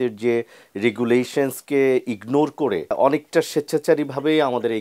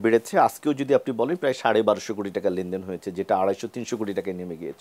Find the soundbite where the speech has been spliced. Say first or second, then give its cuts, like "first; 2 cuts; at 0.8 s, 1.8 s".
first; 1 cut; at 2.9 s